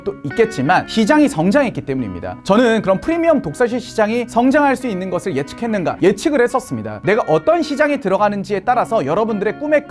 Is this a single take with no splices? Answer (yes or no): no